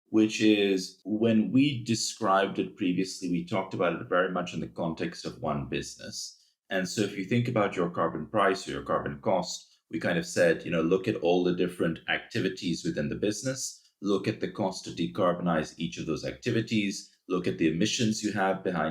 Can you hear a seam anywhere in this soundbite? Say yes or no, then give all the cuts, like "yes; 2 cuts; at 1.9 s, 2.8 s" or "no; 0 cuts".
yes; 1 cut; at 1.0 s